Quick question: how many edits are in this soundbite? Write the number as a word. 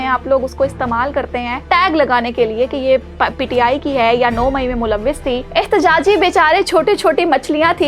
two